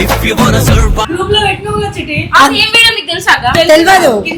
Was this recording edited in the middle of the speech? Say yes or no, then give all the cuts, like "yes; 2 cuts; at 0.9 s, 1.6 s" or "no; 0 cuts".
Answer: no; 0 cuts